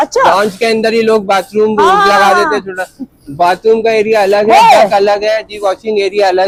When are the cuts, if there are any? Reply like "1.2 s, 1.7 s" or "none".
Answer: none